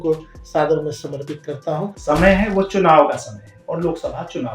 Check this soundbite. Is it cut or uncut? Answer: cut